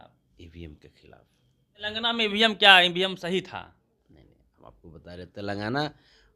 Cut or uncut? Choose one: cut